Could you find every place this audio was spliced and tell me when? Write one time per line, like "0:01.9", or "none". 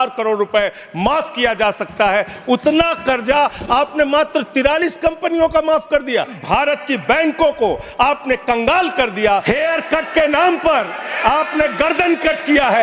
0:06.3
0:09.4